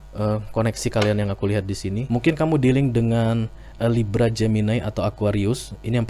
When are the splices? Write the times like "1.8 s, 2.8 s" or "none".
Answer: 2.0 s

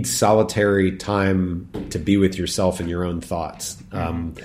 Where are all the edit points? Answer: none

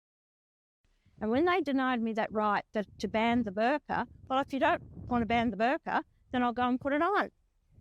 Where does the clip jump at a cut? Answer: none

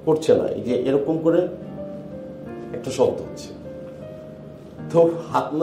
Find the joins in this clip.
none

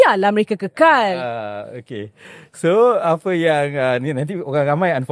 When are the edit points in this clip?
none

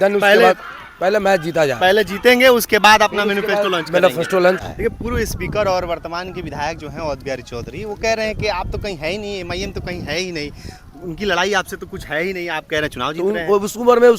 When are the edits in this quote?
4.6 s

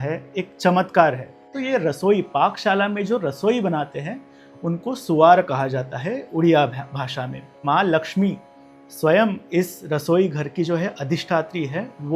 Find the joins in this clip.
1.5 s, 7.6 s

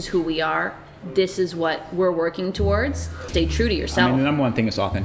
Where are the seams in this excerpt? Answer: 3.2 s

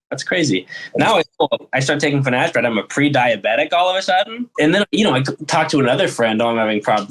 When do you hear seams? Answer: 4.5 s

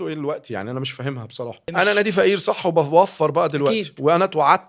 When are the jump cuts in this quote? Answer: 1.6 s

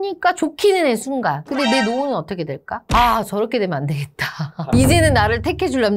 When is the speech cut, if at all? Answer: 1.4 s, 2.9 s

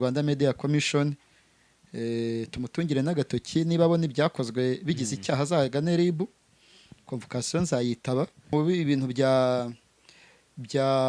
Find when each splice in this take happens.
8.4 s

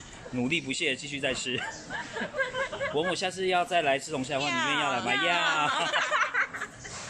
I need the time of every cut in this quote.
none

